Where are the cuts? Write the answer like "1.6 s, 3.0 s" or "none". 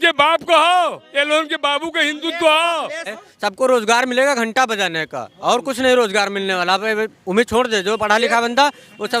3.2 s

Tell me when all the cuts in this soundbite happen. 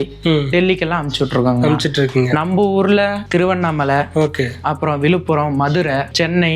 none

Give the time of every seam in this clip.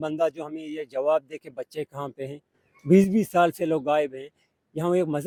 none

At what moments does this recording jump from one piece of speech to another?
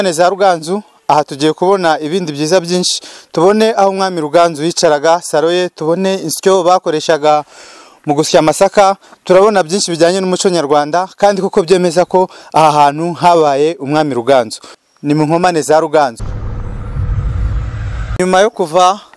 7.3 s, 14.8 s

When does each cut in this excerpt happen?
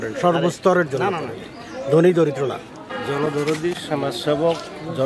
2.9 s

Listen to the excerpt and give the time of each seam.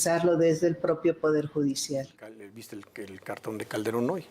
2.5 s

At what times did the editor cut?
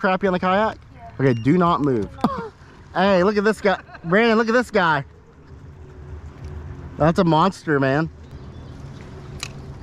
2.2 s, 8.3 s

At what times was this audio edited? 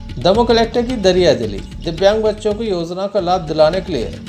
none

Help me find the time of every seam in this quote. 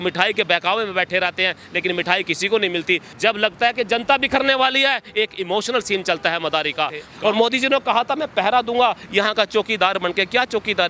3.1 s, 7.1 s

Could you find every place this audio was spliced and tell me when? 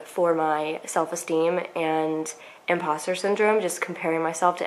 none

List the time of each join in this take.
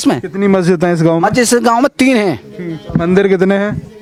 none

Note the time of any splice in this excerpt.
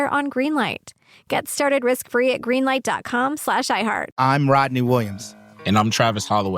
4.1 s

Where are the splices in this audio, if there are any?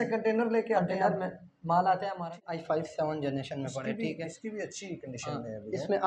2.2 s

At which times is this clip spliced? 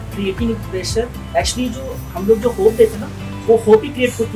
none

